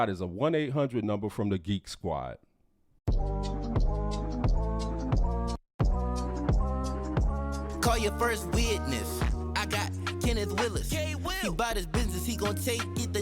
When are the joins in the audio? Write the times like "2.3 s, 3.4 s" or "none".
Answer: 3.0 s